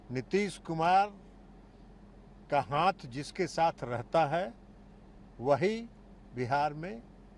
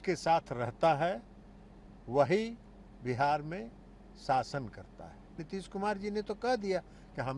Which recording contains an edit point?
second; 1 cut; at 5.4 s

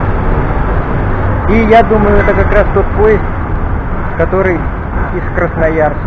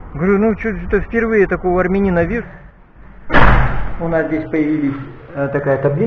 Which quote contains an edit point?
second; 1 cut; at 2.4 s

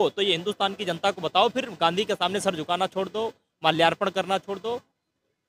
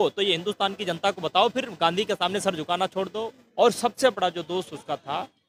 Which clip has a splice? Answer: second; 1 cut; at 3.4 s

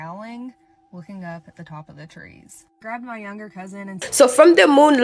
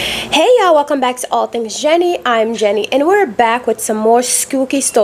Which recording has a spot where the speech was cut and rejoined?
first; 1 cut; at 4.0 s

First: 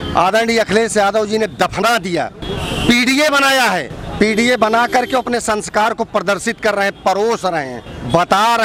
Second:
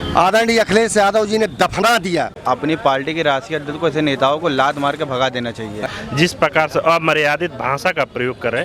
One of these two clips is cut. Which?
second; 2 cuts; at 2.4 s, 5.8 s

